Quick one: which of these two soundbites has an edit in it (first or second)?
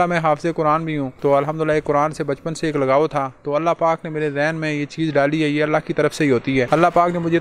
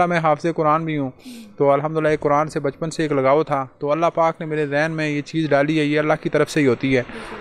first